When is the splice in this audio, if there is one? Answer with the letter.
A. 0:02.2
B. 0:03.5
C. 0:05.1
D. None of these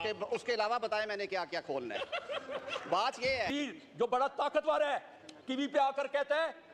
B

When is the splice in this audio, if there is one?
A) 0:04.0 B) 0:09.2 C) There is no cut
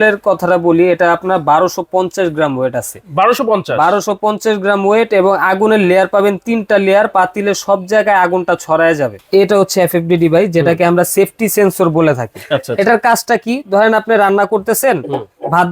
B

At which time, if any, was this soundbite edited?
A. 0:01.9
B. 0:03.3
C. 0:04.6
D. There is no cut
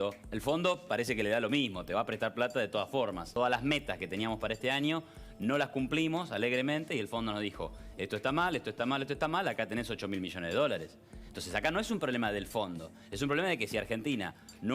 B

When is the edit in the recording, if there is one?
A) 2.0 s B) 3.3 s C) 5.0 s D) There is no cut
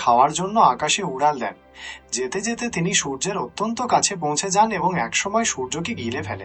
D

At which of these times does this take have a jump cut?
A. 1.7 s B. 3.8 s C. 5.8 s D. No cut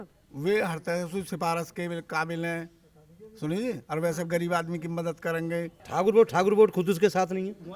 C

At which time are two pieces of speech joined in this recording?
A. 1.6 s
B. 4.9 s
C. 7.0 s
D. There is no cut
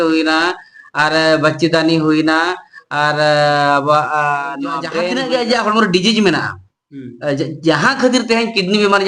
B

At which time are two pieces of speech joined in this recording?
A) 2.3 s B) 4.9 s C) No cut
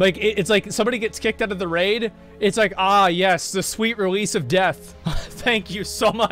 B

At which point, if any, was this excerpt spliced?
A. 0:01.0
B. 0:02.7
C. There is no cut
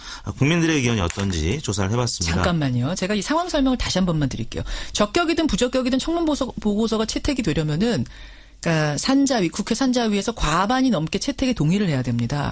A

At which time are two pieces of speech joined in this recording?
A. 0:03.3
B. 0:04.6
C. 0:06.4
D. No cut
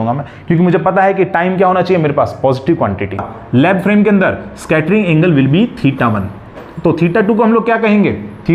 A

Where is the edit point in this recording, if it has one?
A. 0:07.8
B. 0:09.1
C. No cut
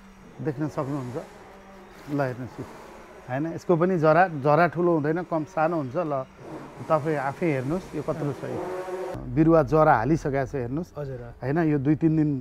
B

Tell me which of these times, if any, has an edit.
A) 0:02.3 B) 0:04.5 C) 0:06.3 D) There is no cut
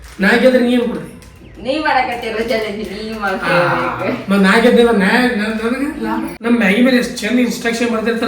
C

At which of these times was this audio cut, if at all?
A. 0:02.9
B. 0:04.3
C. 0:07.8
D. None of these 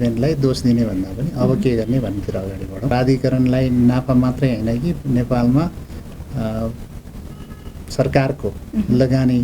A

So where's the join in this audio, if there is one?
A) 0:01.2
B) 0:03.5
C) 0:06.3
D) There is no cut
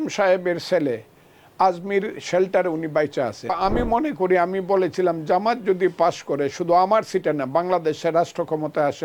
B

